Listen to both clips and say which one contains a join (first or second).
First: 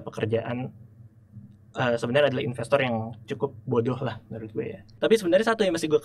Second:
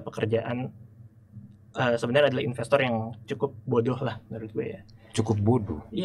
first